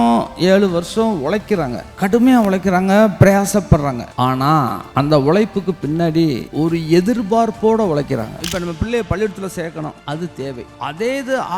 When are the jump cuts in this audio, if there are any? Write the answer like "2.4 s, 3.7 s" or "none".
1.8 s, 4.5 s, 6.4 s, 8.4 s, 10.3 s